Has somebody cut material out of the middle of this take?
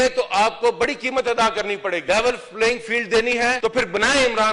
yes; 2 cuts; at 2.0 s, 3.6 s

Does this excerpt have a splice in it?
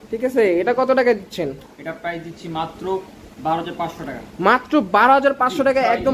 no; 0 cuts

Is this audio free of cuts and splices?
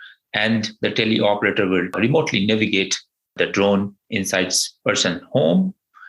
no; 1 cut; at 2.0 s

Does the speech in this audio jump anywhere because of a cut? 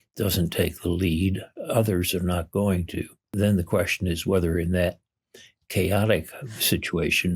yes; 1 cut; at 3.3 s

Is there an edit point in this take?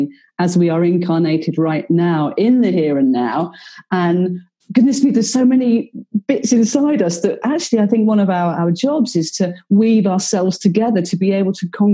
no; 0 cuts

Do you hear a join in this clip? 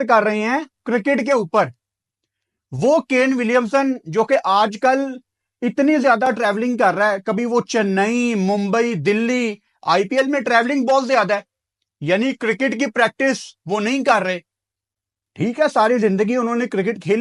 no; 0 cuts

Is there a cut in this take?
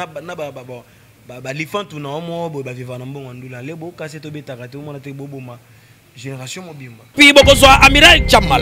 yes; 1 cut; at 7.0 s

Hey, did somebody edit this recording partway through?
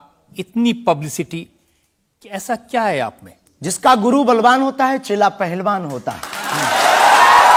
no; 0 cuts

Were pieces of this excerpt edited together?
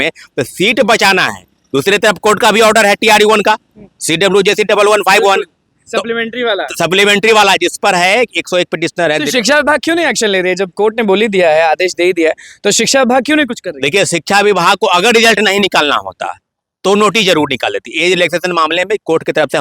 no; 0 cuts

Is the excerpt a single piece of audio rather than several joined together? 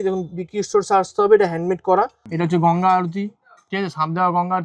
no; 1 cut; at 2.2 s

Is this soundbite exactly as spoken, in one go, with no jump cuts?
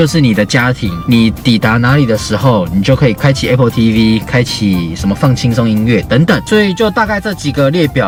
yes; 0 cuts

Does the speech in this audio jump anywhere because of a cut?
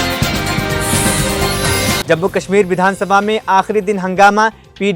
no; 0 cuts

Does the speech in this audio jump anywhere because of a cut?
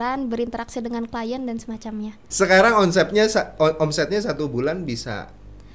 yes; 1 cut; at 2.2 s

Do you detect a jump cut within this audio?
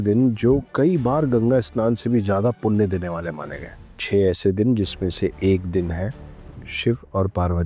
no; 0 cuts

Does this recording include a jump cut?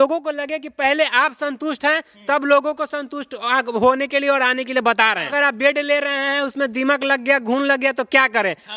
yes; 1 cut; at 5.3 s

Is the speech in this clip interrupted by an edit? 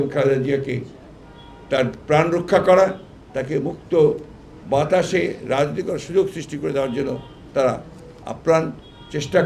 no; 0 cuts

